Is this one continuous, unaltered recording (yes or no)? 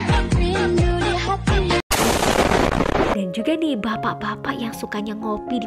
no